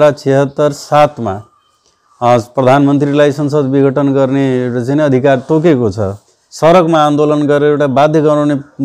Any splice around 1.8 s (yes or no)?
no